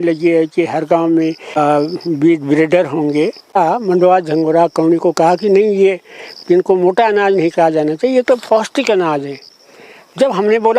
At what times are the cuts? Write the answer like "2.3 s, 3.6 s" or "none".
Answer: 1.5 s, 3.5 s